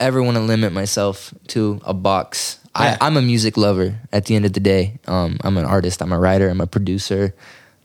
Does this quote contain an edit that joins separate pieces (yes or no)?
no